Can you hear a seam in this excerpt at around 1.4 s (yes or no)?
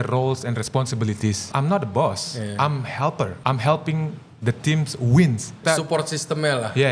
yes